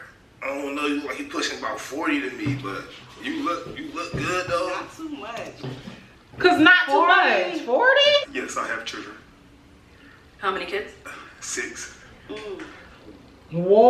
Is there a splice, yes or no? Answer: yes